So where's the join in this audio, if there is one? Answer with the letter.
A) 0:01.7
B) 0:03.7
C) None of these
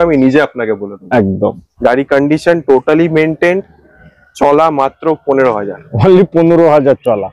A